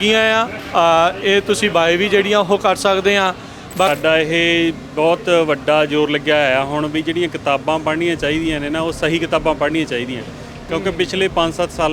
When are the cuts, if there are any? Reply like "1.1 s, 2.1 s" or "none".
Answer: 3.9 s